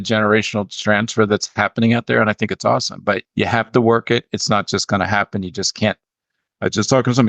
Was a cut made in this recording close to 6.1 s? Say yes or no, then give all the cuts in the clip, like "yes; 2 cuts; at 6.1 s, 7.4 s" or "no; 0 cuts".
no; 1 cut; at 3.2 s